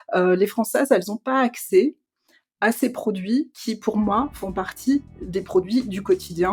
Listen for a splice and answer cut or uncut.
uncut